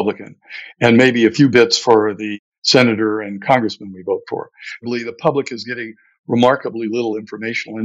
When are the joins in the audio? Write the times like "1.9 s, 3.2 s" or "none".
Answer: 4.8 s